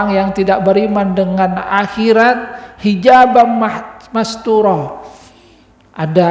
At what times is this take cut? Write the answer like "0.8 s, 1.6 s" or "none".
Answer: none